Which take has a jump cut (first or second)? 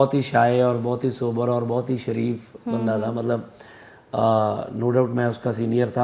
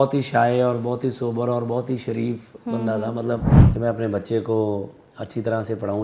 second